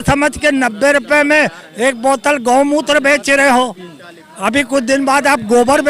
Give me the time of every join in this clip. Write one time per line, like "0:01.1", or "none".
none

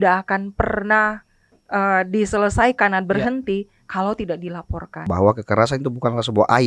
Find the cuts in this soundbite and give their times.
0:05.1

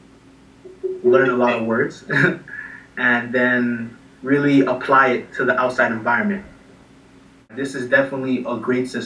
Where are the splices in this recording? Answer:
0:07.5

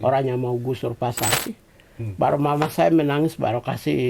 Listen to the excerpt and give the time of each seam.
0:01.4

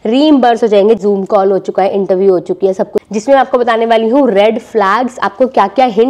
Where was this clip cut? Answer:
0:01.0
0:03.0

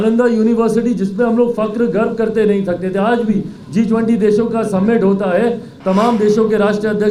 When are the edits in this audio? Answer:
none

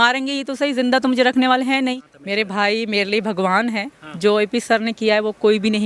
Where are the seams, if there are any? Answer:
0:02.1

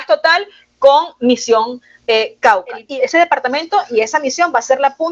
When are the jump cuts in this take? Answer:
0:02.8

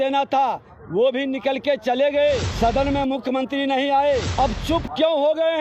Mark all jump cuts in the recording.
0:02.5
0:04.3

